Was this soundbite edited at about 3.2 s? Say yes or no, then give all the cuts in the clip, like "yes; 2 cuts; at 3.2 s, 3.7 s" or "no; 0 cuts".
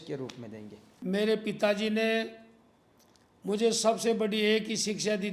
no; 1 cut; at 0.9 s